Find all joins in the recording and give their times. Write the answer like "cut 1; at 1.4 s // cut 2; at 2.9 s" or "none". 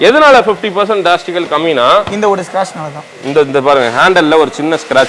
none